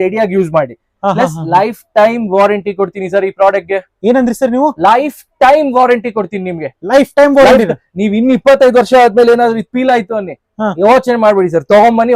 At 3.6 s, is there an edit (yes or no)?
no